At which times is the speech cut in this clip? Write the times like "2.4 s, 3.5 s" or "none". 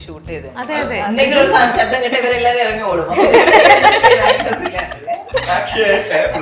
none